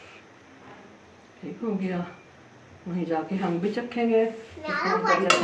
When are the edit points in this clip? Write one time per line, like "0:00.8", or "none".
none